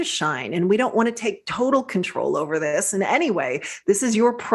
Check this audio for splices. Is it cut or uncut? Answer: uncut